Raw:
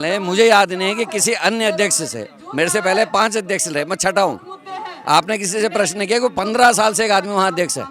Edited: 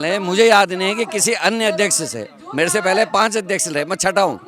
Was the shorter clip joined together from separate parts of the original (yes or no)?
no